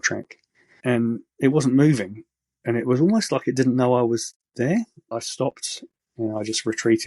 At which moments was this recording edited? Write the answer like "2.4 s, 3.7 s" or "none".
5.0 s

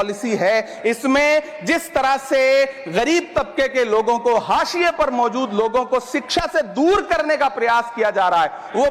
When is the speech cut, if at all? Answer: none

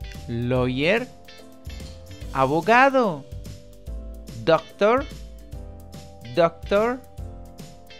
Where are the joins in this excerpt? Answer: none

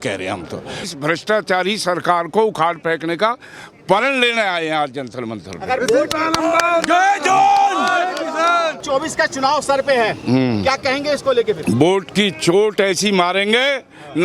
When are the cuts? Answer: 0.8 s, 8.8 s

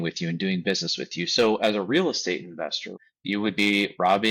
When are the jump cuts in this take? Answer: 3.0 s

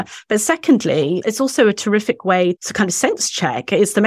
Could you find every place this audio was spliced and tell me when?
1.2 s, 2.6 s

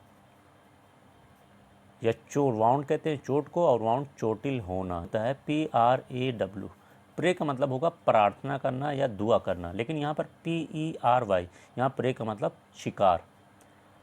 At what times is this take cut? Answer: 5.1 s

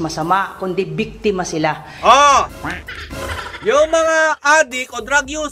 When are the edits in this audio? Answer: none

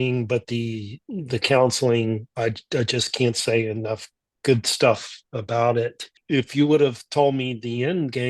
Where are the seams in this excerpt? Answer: 6.1 s

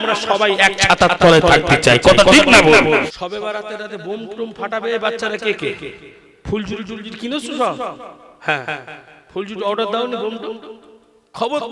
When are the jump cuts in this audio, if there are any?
3.2 s

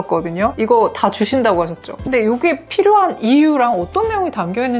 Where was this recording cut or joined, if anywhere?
1.9 s

